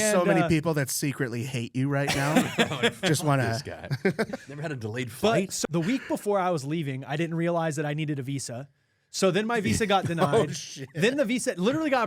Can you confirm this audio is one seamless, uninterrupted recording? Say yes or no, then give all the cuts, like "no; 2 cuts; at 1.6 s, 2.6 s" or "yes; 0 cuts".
no; 1 cut; at 5.5 s